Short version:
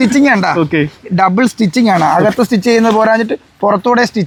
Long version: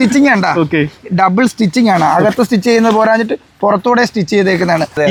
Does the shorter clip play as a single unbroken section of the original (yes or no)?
yes